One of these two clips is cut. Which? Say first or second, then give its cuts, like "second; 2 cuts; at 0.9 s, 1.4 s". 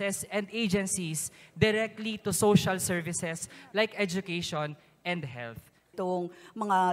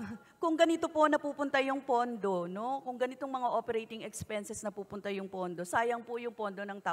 first; 1 cut; at 5.9 s